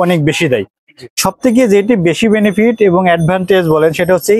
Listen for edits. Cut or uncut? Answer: cut